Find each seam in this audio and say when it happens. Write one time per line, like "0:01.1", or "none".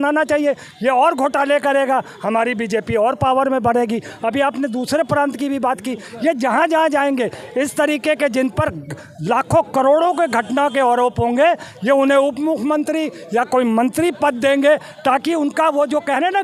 none